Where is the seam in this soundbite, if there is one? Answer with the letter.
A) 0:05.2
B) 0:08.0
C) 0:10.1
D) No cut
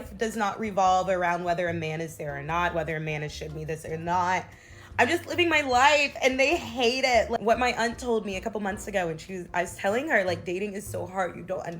B